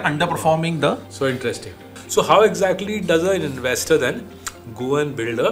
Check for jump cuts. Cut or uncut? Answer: cut